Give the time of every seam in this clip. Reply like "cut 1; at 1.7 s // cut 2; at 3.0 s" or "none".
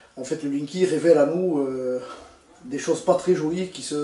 none